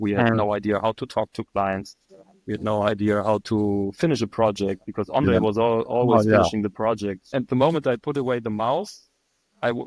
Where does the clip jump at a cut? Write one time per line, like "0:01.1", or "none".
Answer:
0:07.3